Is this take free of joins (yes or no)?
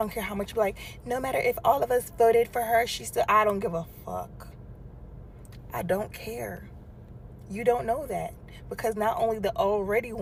yes